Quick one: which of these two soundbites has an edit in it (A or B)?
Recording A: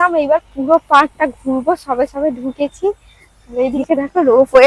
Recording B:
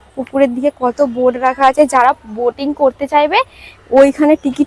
A